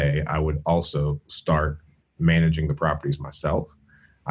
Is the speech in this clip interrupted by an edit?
no; 0 cuts

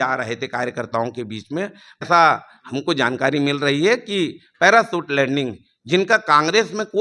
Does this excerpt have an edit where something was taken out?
no; 0 cuts

